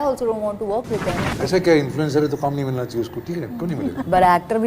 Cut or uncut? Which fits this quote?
cut